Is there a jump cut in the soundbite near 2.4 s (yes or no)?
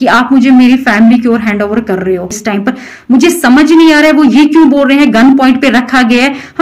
yes